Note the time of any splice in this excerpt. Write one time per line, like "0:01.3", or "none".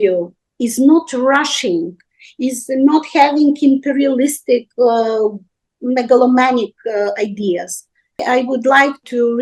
0:08.1

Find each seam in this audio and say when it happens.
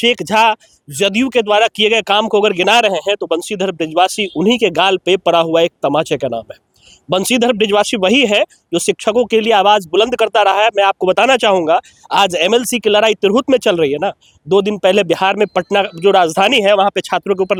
none

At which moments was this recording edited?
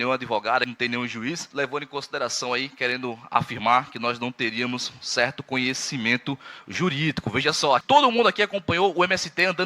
0:01.5
0:07.8

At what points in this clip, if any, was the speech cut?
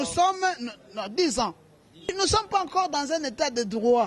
0:02.1

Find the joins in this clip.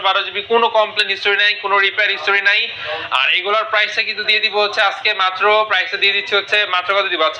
none

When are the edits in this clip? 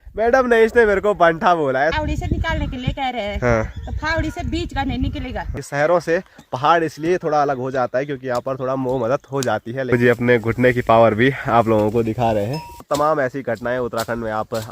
0:01.9
0:05.6
0:09.9
0:12.8

